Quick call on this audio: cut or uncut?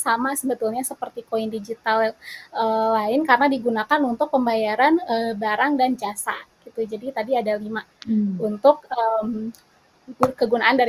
uncut